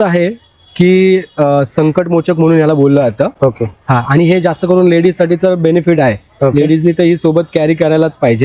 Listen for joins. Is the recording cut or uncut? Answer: uncut